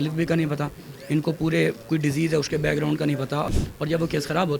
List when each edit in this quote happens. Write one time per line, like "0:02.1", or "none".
0:03.5